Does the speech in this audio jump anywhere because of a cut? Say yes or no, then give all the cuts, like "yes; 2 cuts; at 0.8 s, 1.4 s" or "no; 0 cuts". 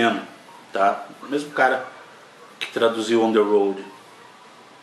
no; 0 cuts